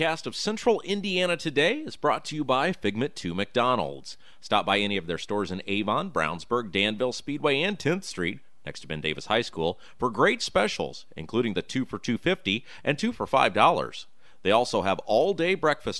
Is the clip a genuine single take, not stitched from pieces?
yes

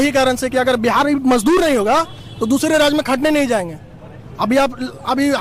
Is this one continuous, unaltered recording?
yes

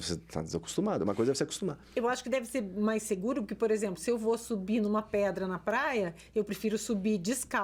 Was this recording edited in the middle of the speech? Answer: no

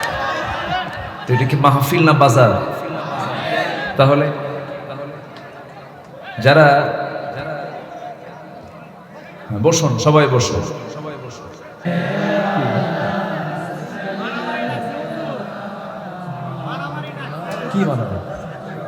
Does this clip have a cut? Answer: yes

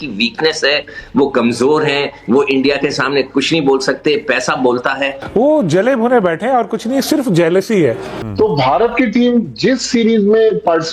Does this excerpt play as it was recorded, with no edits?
no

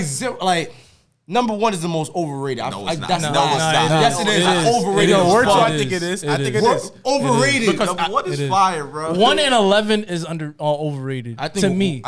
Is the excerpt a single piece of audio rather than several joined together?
yes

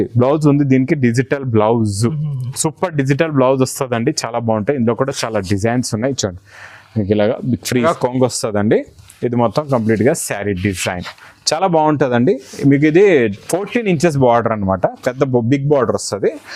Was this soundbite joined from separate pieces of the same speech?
yes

